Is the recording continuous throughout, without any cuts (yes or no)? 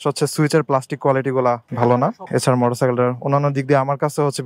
no